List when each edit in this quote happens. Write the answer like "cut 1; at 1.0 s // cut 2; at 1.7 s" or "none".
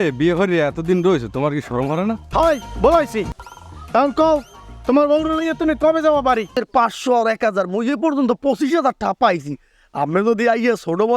cut 1; at 2.2 s // cut 2; at 6.5 s